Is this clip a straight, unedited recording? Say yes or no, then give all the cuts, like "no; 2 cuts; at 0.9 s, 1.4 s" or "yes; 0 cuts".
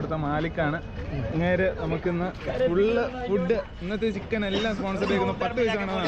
yes; 0 cuts